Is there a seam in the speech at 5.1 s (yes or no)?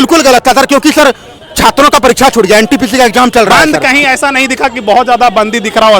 no